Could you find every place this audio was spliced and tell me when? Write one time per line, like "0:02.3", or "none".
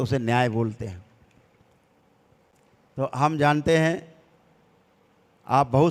none